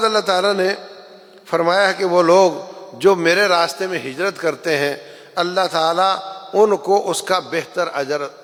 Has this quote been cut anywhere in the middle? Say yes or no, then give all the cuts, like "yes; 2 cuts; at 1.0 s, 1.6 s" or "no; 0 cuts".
no; 0 cuts